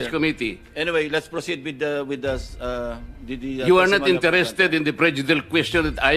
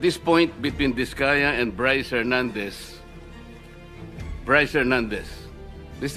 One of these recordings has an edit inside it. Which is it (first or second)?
second